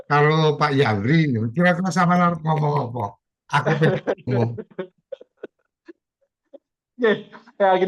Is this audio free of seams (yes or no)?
yes